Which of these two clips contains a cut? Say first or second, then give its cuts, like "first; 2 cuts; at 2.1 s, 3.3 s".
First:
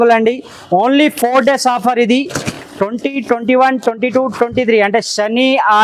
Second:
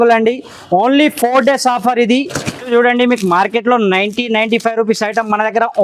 second; 1 cut; at 2.6 s